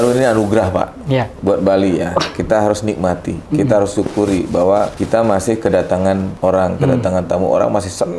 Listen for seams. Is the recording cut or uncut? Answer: cut